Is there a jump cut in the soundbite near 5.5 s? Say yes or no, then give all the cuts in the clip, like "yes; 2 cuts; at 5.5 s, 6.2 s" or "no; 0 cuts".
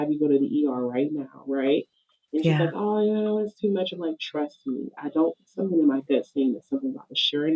no; 0 cuts